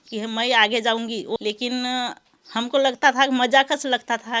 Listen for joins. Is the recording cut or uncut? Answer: cut